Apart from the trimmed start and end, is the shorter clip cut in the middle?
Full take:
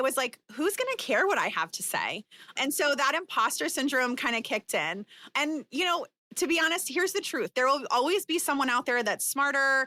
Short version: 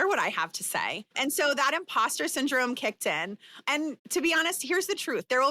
yes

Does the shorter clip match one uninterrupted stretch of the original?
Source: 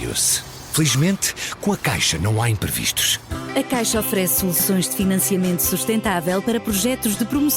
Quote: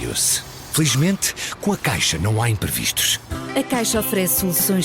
yes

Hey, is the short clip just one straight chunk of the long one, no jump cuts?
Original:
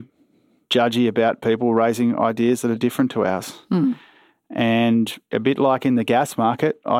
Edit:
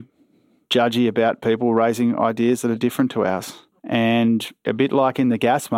no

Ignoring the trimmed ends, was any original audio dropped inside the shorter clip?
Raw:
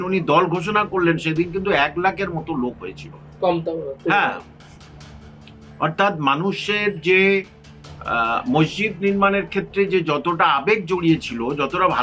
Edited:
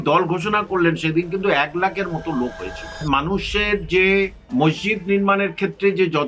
yes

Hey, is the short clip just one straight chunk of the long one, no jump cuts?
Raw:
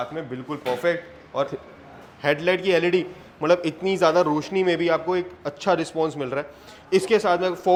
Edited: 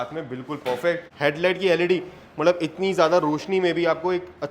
no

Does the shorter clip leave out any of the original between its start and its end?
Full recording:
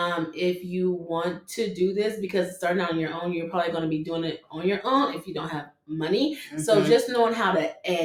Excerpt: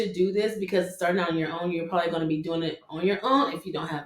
no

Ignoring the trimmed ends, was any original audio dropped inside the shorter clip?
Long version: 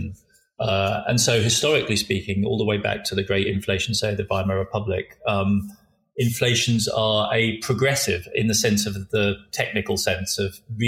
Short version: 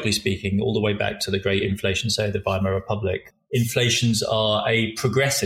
yes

